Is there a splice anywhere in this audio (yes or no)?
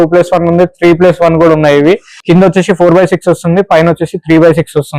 yes